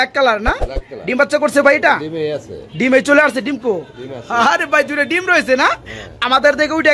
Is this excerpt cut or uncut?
uncut